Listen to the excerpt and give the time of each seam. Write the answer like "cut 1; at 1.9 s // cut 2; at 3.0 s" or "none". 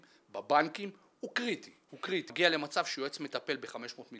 cut 1; at 2.3 s